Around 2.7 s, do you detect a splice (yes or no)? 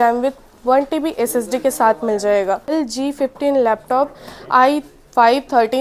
yes